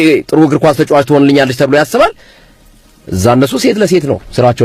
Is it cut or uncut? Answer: uncut